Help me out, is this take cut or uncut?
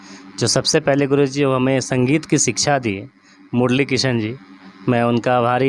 uncut